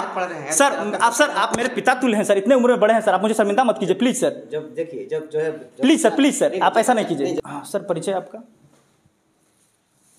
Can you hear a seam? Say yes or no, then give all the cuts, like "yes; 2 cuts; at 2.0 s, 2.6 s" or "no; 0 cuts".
yes; 1 cut; at 7.4 s